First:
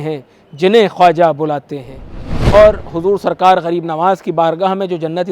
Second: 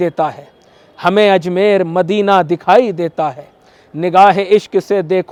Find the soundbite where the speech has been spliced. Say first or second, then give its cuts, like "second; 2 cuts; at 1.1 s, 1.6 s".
first; 1 cut; at 2.5 s